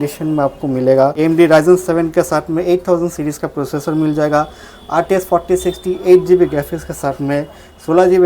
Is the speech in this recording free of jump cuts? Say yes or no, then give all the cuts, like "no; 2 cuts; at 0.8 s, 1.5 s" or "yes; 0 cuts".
no; 1 cut; at 1.1 s